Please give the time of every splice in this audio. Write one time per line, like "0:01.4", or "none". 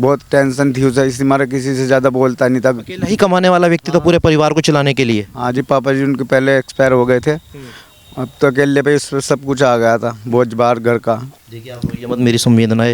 0:11.4